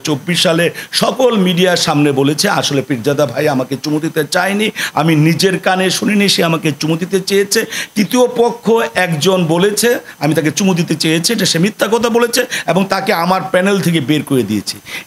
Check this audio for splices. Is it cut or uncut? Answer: uncut